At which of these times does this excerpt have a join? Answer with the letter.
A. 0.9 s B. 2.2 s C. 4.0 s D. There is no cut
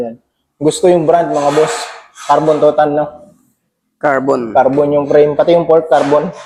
D